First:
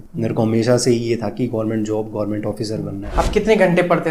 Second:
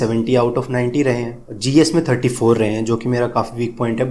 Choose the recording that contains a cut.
first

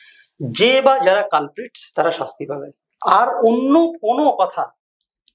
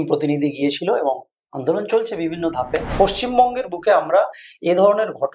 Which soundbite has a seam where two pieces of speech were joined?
second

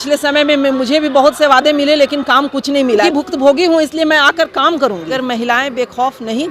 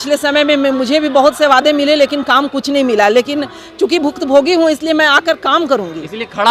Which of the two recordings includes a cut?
first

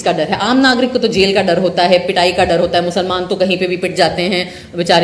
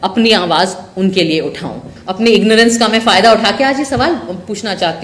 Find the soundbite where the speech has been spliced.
second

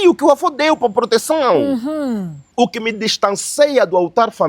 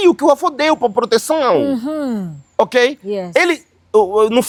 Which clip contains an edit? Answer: first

